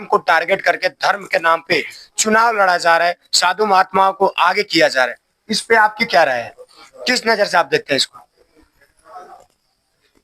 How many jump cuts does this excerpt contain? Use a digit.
0